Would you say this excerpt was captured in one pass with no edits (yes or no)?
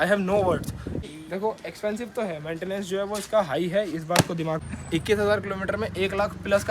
no